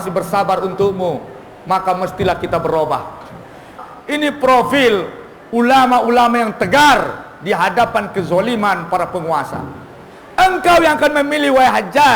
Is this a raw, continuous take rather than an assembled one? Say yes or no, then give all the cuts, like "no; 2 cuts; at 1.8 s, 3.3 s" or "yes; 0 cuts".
no; 1 cut; at 3.7 s